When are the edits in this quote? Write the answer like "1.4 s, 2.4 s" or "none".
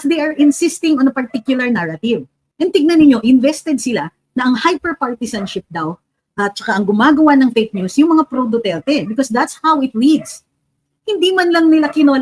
2.4 s